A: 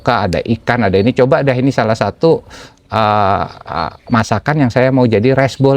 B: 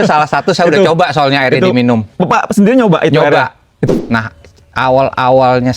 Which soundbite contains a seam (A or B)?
B